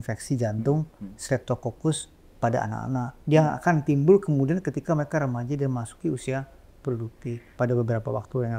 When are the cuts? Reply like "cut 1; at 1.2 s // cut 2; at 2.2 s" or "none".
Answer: cut 1; at 7.4 s